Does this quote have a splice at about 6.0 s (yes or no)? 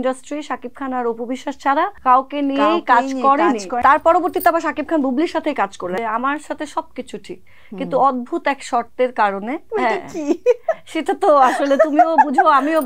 yes